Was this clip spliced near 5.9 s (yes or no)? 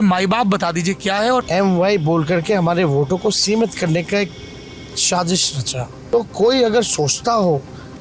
yes